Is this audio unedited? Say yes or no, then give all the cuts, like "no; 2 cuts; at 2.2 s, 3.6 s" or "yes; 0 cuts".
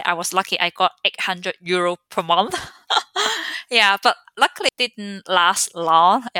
no; 1 cut; at 4.7 s